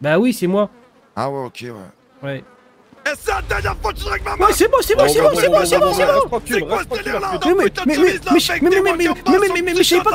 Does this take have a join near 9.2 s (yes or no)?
no